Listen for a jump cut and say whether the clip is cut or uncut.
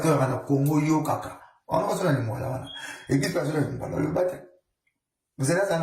uncut